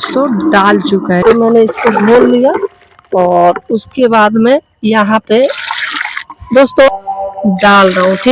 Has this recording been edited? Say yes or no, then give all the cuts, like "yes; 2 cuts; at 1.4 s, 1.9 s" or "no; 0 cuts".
yes; 2 cuts; at 1.2 s, 6.9 s